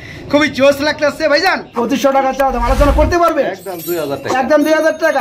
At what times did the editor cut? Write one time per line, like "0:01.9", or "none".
0:01.7